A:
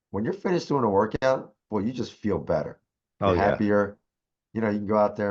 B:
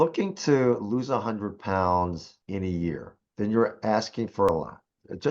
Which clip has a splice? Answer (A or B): B